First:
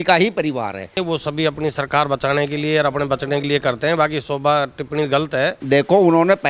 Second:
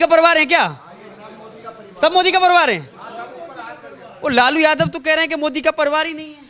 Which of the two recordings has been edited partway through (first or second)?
first